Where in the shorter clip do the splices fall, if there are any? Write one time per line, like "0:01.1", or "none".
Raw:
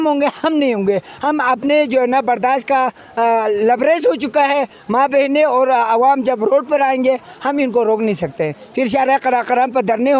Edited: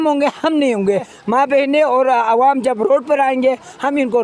0:01.1